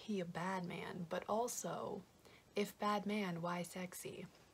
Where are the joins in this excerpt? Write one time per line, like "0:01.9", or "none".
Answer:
none